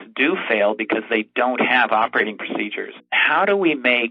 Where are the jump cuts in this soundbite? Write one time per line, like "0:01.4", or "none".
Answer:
0:03.1